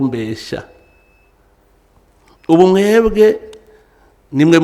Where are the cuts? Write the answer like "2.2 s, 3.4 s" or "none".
none